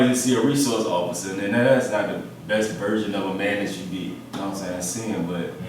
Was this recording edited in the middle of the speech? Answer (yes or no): no